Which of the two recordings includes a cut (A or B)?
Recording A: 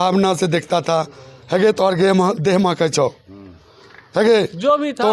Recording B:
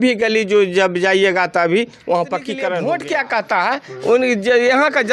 B